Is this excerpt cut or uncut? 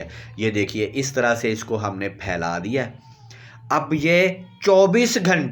uncut